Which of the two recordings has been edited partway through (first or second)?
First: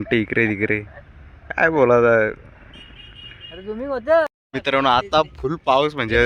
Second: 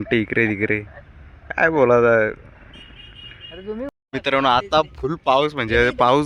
second